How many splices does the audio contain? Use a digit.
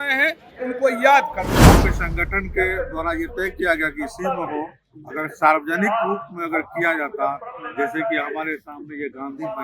1